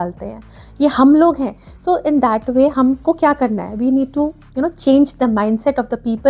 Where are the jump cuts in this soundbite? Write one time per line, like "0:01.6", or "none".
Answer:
none